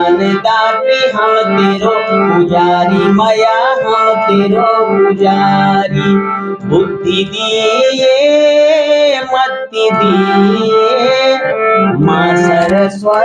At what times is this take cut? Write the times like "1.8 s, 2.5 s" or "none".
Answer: none